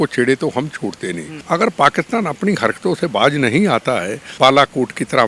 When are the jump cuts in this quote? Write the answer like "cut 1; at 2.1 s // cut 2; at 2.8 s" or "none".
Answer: cut 1; at 1.3 s // cut 2; at 4.2 s